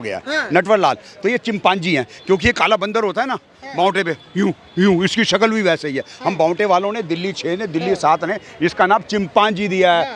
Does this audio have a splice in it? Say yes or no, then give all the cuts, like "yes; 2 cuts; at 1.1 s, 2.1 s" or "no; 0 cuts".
no; 0 cuts